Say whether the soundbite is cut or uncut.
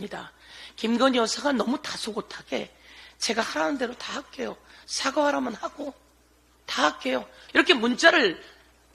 cut